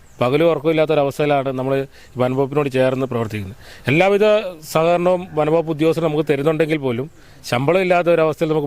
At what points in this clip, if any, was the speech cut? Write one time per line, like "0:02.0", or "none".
none